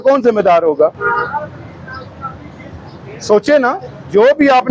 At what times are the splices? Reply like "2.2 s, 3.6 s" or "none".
none

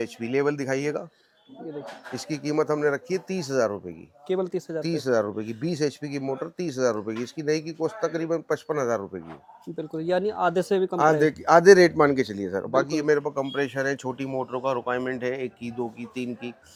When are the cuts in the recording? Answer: none

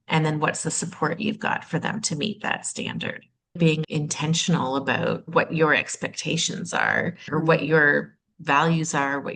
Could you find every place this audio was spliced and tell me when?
3.8 s, 5.3 s, 7.3 s

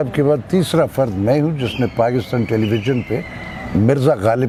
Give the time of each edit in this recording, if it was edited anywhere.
none

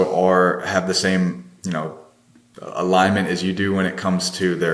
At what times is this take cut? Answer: none

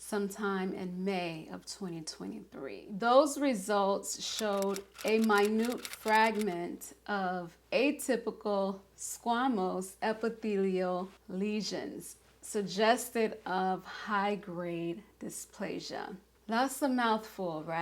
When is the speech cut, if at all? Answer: none

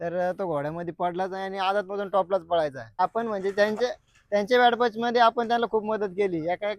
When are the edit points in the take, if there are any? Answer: 3.0 s

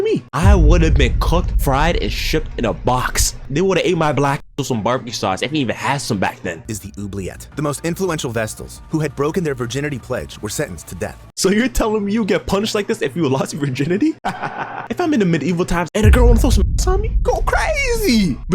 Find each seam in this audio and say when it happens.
7.0 s, 11.3 s, 14.8 s

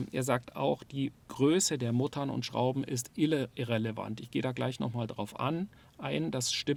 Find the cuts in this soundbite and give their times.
none

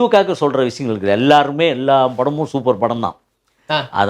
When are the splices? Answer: none

